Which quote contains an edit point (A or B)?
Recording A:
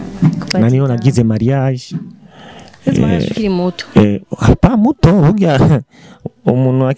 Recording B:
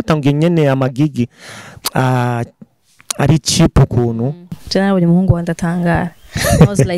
B